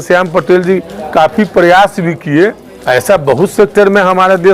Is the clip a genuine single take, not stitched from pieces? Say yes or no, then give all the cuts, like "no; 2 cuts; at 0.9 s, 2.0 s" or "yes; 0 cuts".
no; 1 cut; at 2.7 s